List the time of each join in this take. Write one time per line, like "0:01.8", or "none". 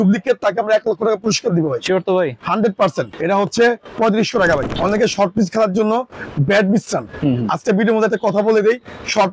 0:03.1
0:04.7